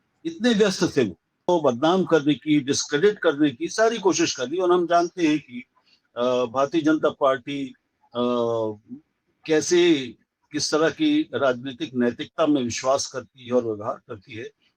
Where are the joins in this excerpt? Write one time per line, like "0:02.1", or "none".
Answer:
0:01.5